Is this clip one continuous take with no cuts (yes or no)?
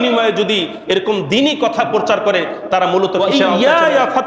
no